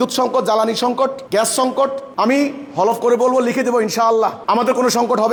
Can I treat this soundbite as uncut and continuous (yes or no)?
yes